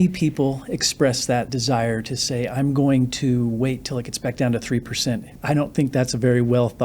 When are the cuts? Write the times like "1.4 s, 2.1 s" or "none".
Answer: 1.5 s, 5.3 s